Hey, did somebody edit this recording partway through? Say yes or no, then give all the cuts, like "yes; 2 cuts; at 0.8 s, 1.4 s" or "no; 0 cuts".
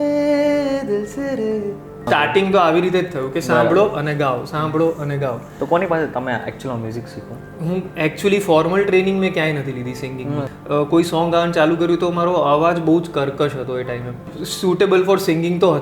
yes; 3 cuts; at 2.0 s, 10.5 s, 14.3 s